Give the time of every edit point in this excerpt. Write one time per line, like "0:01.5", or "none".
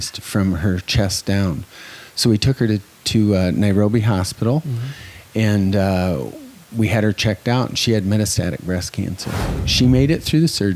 0:09.7